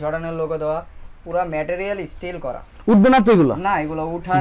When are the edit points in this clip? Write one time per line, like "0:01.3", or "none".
none

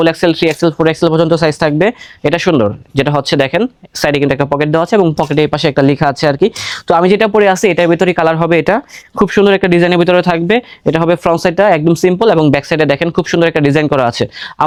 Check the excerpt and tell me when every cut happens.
none

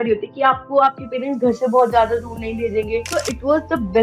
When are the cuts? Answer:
0:03.1

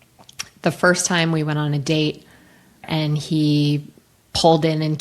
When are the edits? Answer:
0:02.8

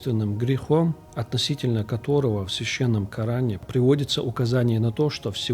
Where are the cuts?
0:01.1
0:03.6

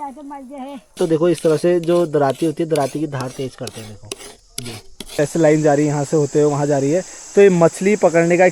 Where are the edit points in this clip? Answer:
0:00.9
0:05.2

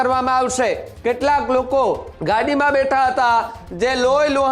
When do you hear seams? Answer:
0:00.9
0:02.1

